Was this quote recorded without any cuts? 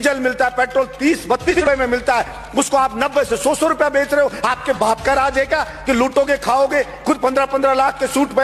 no; 1 cut; at 1.5 s

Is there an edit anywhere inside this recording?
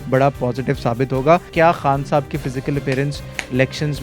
yes; 1 cut; at 1.5 s

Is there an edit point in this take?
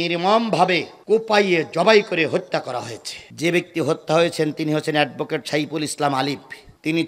no; 0 cuts

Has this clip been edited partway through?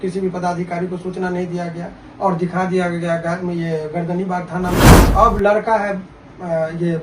yes; 1 cut; at 5.0 s

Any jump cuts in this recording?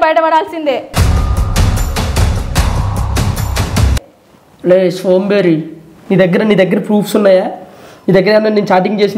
no; 0 cuts

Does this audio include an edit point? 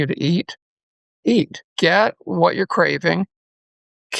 yes; 1 cut; at 1.6 s

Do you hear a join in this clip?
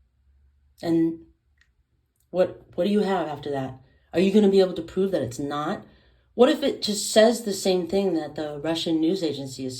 no; 0 cuts

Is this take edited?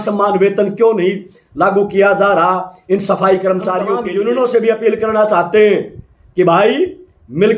yes; 1 cut; at 4.0 s

